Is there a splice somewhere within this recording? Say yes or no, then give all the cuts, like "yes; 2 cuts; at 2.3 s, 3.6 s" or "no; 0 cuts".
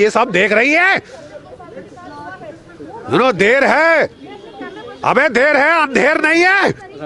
no; 0 cuts